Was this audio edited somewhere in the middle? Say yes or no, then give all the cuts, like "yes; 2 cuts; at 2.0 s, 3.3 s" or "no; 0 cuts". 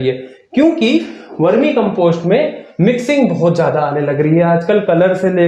no; 0 cuts